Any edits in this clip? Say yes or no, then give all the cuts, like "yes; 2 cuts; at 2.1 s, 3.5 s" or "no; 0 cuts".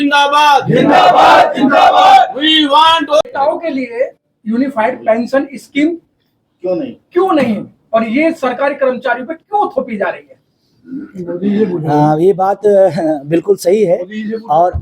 yes; 1 cut; at 3.2 s